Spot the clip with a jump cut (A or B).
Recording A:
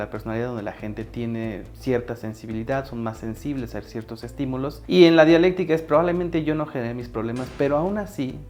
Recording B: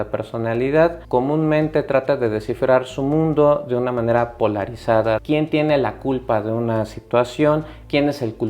B